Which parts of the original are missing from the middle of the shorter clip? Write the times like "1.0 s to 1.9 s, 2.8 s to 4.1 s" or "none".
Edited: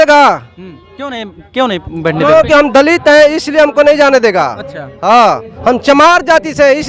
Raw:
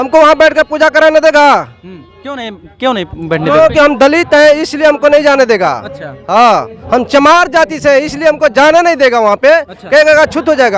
none